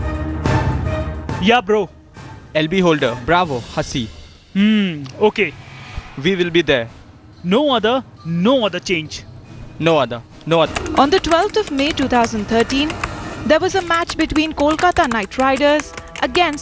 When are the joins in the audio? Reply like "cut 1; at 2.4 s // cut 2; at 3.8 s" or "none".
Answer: cut 1; at 10.7 s